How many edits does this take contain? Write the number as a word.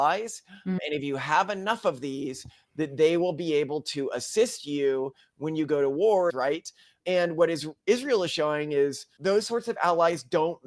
three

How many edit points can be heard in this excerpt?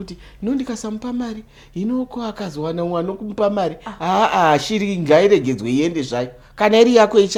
zero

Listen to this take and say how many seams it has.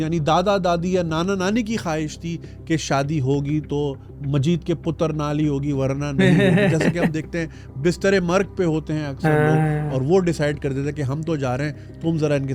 zero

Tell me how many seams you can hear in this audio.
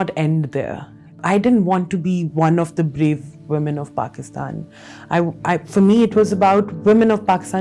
one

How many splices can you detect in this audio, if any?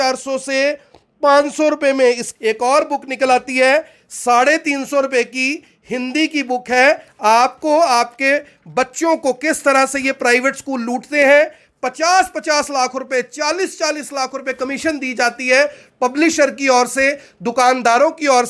one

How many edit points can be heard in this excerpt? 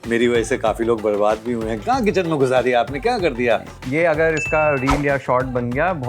two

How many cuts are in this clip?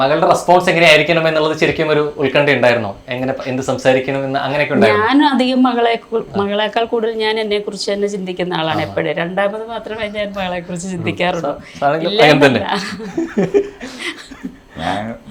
zero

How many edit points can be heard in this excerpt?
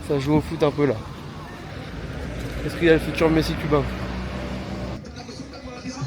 two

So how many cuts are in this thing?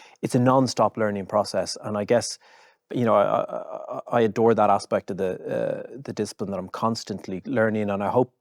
one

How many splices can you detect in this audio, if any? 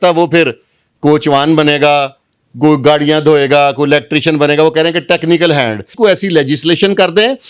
one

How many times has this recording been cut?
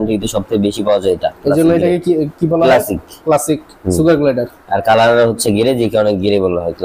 zero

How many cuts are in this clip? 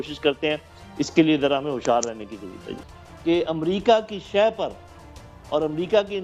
zero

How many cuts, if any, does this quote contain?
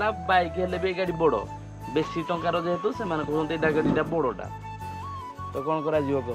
zero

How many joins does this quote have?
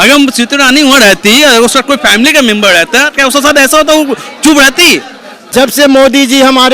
one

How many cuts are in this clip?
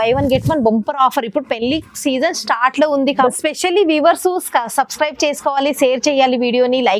one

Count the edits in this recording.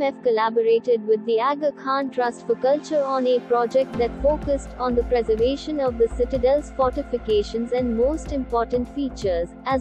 zero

